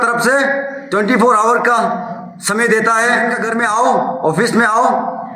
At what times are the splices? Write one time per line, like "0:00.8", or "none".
0:03.4